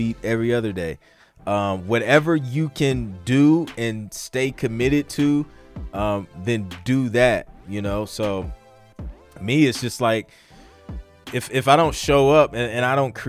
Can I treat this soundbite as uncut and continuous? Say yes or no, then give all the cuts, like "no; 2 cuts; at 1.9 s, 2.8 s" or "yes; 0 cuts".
yes; 0 cuts